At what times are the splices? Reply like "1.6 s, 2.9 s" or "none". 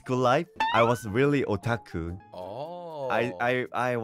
2.2 s